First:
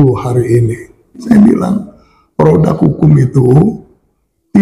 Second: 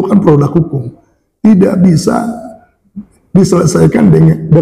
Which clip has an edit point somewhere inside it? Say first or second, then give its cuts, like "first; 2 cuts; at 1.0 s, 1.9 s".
first; 1 cut; at 1.3 s